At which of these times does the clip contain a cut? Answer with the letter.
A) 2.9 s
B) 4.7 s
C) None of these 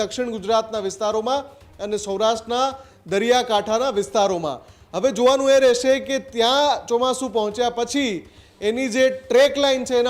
C